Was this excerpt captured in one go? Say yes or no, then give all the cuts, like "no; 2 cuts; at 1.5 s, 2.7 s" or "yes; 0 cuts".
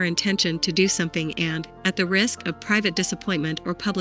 yes; 0 cuts